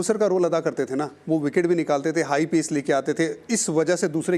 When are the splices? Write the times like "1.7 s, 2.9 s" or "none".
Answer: none